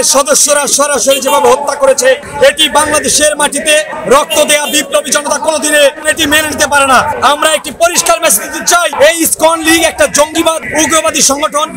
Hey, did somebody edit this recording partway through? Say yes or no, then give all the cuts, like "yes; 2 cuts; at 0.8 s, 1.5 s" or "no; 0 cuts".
no; 0 cuts